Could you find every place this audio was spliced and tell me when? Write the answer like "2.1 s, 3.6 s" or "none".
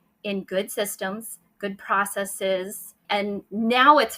3.0 s